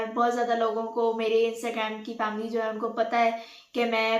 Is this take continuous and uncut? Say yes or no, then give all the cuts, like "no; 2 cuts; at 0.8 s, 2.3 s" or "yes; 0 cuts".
yes; 0 cuts